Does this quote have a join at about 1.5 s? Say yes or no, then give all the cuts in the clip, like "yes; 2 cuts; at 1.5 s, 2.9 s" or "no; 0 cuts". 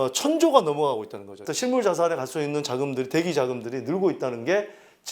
yes; 1 cut; at 1.5 s